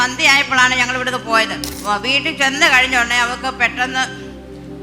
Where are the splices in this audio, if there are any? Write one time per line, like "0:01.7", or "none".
0:01.8

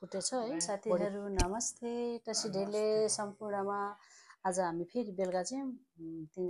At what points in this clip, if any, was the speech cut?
0:01.0

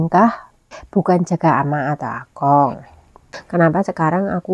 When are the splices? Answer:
0:03.3

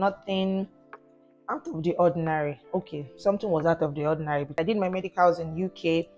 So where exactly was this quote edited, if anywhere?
0:04.5

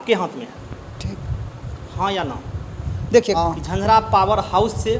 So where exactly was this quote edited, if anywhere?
0:03.4

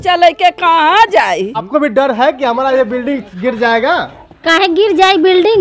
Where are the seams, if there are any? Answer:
none

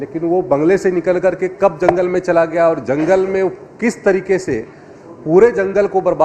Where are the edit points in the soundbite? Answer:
none

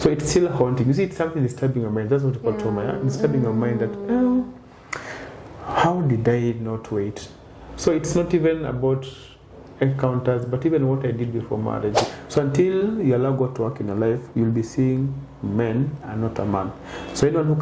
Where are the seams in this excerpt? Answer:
0:12.0

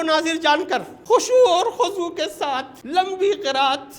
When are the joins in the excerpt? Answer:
0:00.9
0:02.7

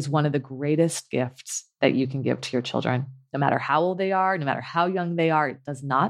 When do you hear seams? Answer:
none

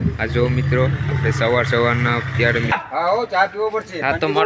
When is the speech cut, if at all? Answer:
0:02.8

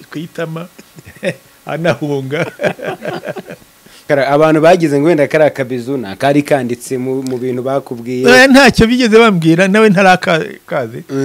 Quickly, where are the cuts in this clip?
0:04.1

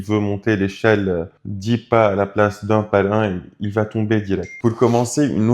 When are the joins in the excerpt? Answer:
0:04.5

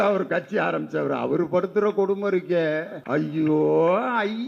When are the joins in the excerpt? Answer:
0:02.9

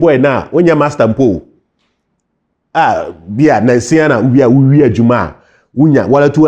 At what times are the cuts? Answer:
none

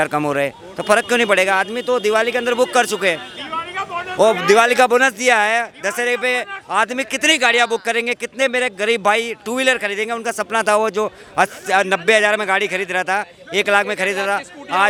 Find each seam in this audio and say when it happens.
none

